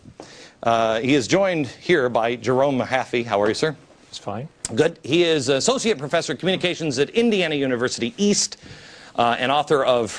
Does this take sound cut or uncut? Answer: cut